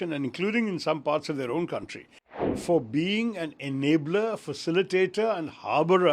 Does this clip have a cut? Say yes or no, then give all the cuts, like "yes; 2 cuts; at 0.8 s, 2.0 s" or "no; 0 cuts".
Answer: yes; 1 cut; at 2.5 s